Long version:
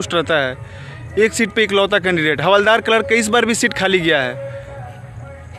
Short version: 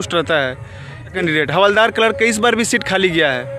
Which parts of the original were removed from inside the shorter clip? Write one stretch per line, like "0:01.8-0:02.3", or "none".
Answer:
0:01.1-0:02.0